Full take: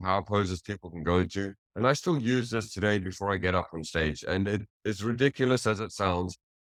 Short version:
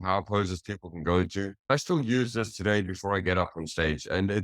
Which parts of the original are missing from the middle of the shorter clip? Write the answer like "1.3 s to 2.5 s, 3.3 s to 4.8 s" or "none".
1.7 s to 1.9 s